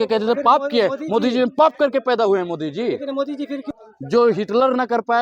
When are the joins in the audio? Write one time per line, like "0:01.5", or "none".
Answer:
0:03.6